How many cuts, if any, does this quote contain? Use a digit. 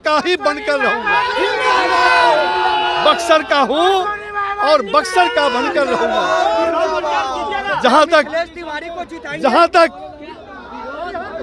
0